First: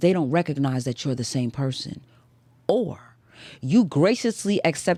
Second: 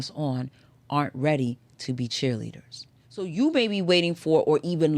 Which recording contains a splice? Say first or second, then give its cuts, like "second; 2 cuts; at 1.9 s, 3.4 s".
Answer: second; 1 cut; at 3.3 s